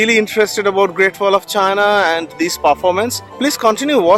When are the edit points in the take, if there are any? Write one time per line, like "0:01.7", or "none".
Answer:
none